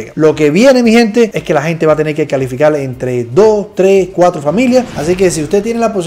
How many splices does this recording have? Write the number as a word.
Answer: one